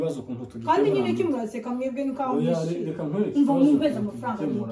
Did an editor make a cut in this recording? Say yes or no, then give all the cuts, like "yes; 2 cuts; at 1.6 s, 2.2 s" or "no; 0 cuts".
no; 0 cuts